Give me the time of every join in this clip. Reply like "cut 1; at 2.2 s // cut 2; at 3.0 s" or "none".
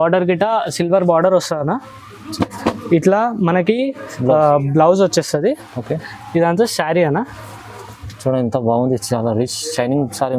none